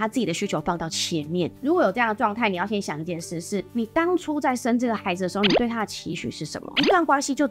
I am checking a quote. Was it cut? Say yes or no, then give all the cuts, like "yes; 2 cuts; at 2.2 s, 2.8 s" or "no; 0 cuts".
yes; 1 cut; at 1.5 s